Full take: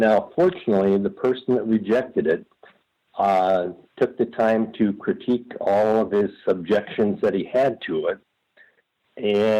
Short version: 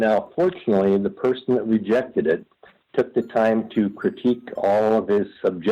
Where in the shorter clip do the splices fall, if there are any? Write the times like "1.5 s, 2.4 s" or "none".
2.8 s